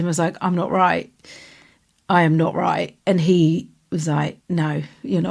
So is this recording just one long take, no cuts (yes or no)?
no